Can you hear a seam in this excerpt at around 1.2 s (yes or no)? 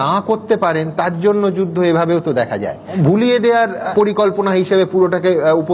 no